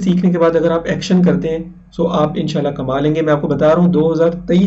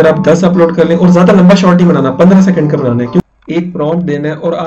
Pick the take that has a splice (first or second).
second